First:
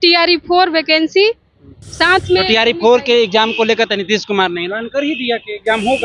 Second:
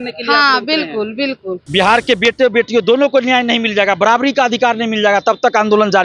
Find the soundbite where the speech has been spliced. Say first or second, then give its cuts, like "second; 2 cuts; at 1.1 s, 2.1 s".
second; 1 cut; at 1.6 s